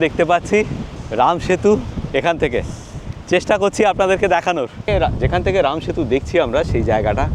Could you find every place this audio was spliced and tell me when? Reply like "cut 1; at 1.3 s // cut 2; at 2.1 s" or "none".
none